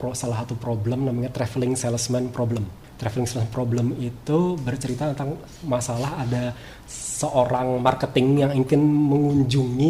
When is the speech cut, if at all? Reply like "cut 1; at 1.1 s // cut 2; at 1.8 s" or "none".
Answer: cut 1; at 2.8 s